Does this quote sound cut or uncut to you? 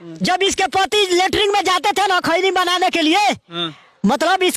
uncut